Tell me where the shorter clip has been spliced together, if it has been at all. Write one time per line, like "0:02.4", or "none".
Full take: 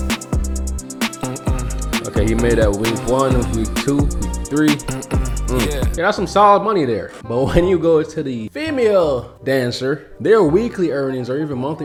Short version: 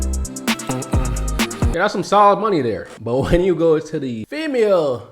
0:01.6